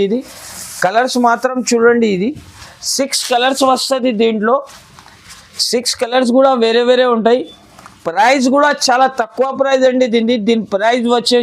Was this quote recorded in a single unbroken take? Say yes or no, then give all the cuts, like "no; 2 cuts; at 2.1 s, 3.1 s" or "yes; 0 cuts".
yes; 0 cuts